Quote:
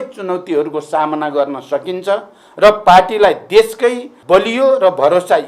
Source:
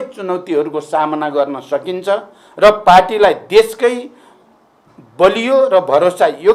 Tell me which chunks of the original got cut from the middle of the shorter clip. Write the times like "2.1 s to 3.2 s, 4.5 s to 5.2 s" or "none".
4.1 s to 5.0 s